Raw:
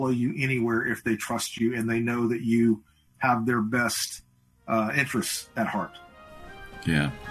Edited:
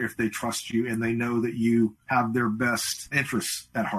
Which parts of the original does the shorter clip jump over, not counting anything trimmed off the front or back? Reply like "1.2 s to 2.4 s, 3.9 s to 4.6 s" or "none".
2.9 s to 3.1 s, 4.3 s to 4.9 s